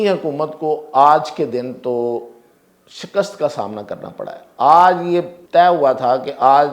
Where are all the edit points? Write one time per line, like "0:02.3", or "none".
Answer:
0:05.4